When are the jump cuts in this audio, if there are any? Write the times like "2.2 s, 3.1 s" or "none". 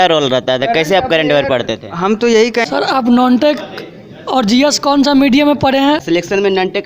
2.7 s, 6.0 s